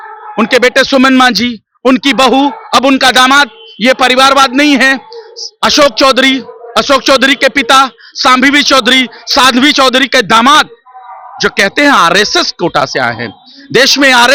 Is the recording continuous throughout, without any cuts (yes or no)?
yes